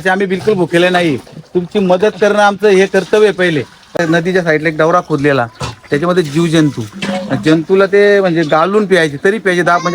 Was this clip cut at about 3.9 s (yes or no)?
yes